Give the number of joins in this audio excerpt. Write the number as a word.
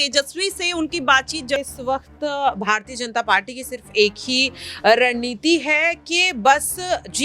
one